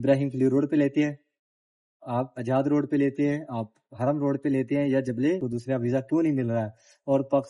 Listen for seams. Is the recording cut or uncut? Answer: cut